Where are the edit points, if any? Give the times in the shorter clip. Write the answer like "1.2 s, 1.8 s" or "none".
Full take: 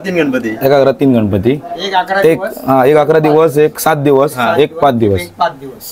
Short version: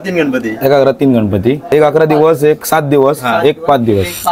1.7 s